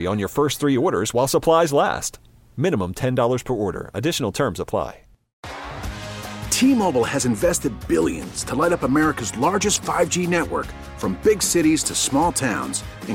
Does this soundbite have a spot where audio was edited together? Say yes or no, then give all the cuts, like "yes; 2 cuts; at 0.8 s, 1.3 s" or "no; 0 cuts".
yes; 1 cut; at 5.4 s